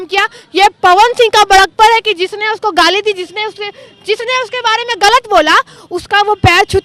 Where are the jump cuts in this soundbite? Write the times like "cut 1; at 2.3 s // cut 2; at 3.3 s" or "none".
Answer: none